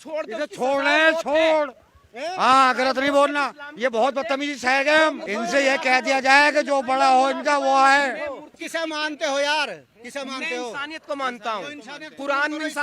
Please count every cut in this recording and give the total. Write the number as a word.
two